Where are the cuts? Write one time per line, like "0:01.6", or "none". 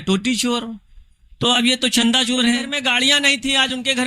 0:02.7